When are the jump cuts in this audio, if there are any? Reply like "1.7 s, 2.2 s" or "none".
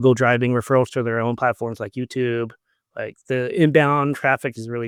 none